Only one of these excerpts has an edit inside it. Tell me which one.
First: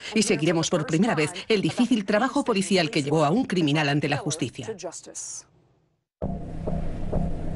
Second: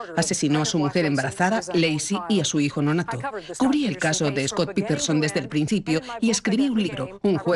first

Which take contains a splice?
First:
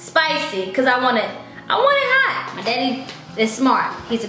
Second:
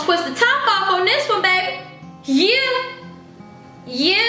first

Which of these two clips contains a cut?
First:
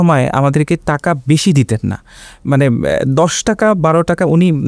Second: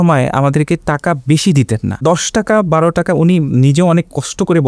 second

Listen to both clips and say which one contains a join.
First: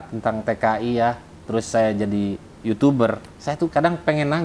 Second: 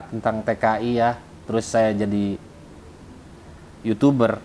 first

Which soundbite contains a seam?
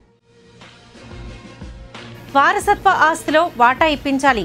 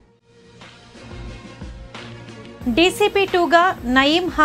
first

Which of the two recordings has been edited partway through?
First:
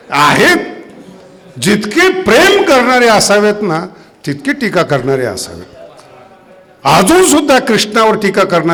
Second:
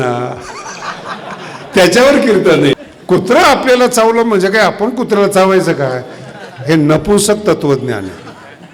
second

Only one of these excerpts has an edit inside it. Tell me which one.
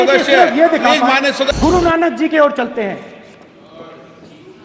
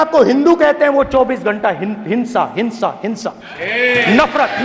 first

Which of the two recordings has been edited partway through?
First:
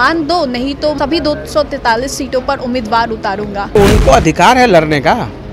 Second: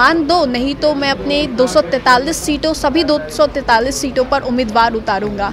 first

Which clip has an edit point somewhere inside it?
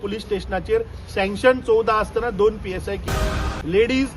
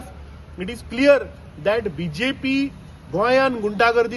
first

